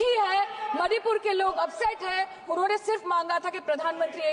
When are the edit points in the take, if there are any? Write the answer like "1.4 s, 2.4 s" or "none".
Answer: none